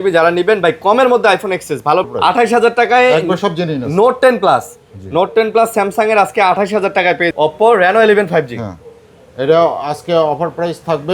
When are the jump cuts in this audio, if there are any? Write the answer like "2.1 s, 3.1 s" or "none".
2.1 s, 7.3 s